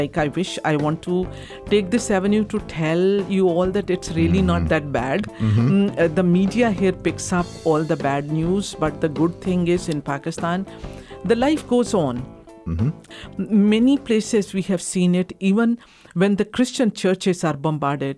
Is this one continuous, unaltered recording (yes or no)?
yes